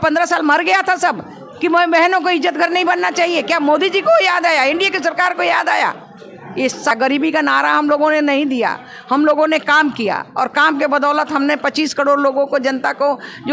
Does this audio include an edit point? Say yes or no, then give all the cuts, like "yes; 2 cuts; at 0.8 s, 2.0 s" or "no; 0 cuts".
yes; 1 cut; at 6.9 s